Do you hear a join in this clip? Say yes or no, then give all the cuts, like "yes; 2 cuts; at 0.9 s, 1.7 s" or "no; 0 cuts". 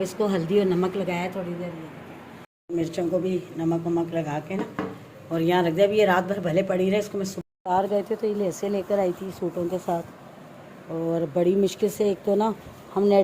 yes; 2 cuts; at 2.5 s, 7.3 s